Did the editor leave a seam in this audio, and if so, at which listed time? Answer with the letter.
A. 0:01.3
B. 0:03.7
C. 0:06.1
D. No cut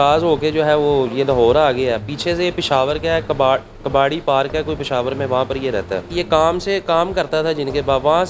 C